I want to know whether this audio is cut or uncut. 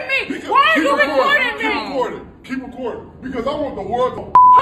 cut